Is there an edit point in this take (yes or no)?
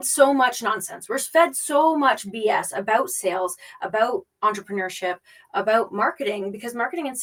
no